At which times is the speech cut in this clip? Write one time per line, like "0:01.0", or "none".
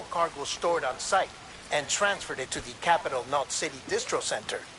0:03.5